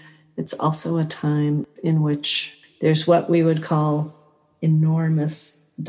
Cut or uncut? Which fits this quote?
cut